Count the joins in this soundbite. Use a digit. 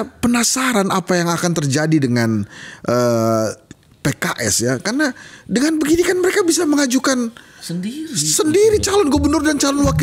0